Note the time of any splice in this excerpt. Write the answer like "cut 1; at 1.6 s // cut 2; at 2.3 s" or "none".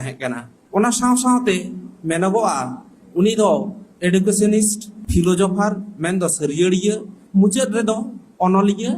cut 1; at 3.8 s // cut 2; at 7.1 s